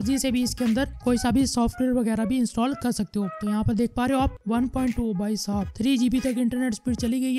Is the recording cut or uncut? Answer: cut